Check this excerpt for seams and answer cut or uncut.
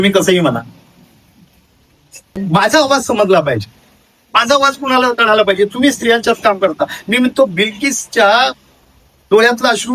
cut